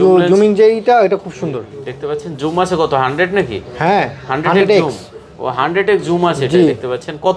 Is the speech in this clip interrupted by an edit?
no; 0 cuts

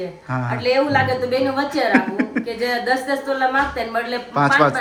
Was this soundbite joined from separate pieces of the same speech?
no; 0 cuts

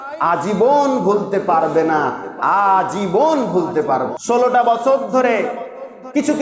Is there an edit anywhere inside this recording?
yes; 1 cut; at 4.1 s

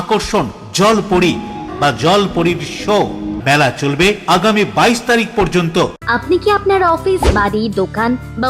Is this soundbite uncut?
no; 3 cuts; at 1.7 s, 3.3 s, 6.0 s

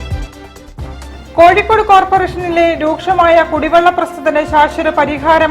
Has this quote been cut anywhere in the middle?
yes; 1 cut; at 1.0 s

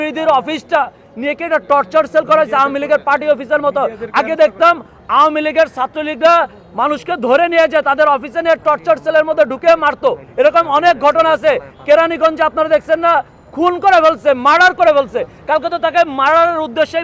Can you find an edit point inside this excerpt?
no; 0 cuts

